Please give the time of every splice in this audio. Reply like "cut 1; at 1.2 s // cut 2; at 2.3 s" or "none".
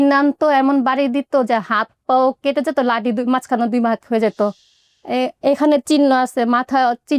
none